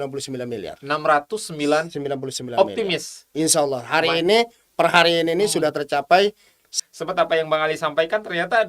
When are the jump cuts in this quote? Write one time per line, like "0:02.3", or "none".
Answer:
0:06.7